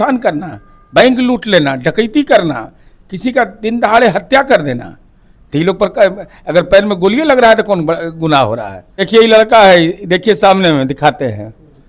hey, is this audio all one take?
no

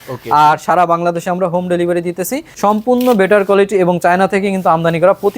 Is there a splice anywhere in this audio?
yes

